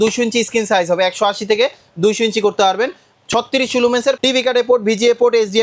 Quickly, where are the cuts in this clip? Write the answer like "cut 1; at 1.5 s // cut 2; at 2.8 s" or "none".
cut 1; at 4.2 s